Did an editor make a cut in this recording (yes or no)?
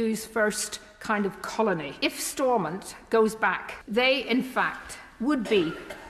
yes